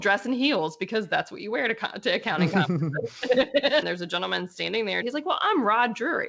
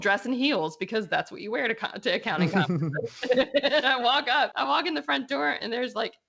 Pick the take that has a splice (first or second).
first